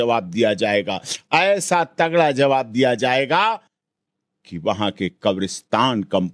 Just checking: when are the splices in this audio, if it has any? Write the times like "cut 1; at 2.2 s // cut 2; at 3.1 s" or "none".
none